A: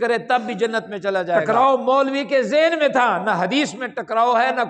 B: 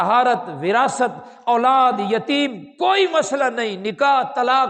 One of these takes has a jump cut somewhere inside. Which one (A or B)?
A